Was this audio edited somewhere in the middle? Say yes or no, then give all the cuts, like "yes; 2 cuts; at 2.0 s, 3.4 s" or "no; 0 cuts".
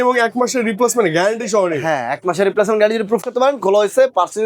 no; 0 cuts